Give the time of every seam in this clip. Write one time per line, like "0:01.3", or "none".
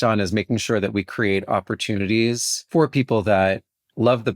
0:02.5